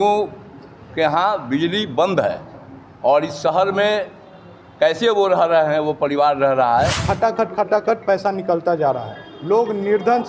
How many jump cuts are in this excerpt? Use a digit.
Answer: 1